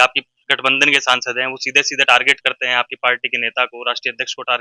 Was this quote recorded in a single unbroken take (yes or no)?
yes